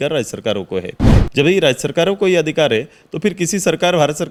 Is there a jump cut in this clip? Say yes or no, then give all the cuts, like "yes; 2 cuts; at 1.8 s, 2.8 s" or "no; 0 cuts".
no; 0 cuts